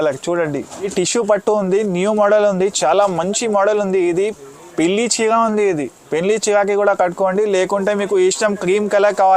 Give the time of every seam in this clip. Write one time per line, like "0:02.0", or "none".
0:00.9